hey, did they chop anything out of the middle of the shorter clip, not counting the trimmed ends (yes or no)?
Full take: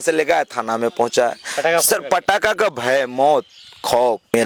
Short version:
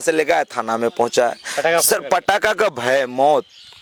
no